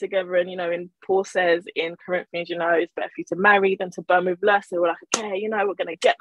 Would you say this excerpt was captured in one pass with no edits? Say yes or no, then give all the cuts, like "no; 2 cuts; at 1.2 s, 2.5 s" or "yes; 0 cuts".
yes; 0 cuts